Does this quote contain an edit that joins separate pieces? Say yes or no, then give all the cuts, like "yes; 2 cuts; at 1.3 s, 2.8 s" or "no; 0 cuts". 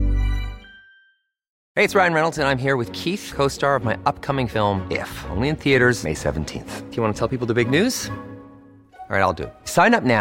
yes; 1 cut; at 1.5 s